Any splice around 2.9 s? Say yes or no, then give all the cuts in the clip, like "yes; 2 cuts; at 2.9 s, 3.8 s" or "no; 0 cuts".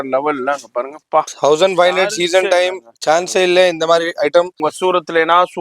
no; 1 cut; at 4.7 s